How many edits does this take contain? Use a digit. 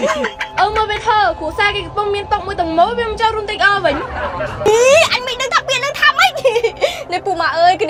0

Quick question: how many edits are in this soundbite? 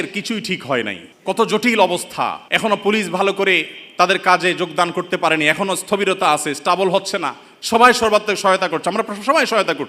2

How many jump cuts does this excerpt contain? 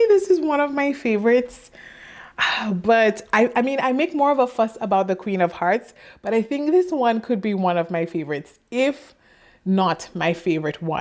0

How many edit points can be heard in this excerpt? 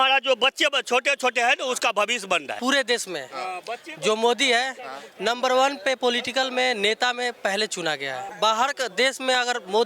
2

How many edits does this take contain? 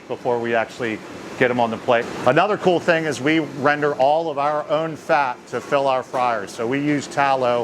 1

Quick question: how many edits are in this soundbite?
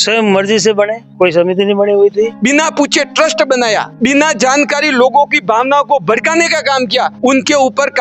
1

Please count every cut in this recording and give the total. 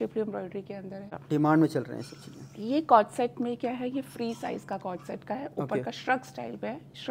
1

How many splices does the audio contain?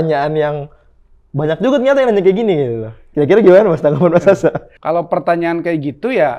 1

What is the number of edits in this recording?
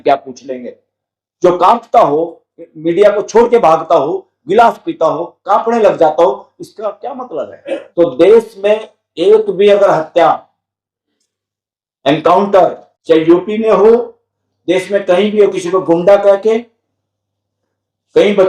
1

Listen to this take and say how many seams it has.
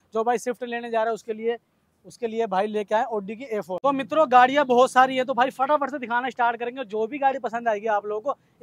1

